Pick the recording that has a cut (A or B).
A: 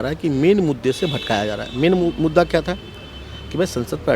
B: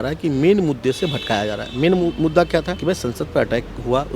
B